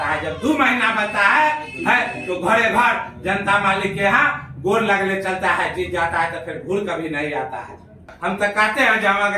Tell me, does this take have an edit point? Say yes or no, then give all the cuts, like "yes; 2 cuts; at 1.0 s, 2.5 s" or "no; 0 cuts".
yes; 1 cut; at 8.1 s